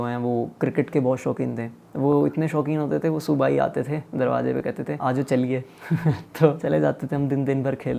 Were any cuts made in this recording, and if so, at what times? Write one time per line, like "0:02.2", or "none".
0:01.8
0:04.9
0:06.6